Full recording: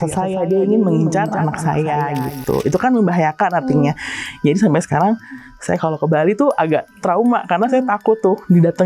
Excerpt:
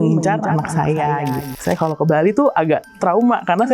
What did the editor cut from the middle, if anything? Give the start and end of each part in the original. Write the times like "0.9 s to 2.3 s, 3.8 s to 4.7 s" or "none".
2.3 s to 5.4 s